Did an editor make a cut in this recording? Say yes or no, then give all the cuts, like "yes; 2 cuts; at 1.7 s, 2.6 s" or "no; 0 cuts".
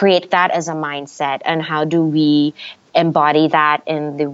no; 0 cuts